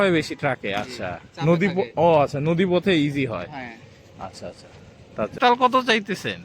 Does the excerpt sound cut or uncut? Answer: cut